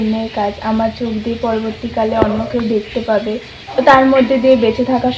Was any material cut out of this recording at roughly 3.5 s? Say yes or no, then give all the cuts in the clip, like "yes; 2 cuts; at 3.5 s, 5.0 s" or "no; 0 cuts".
yes; 1 cut; at 3.5 s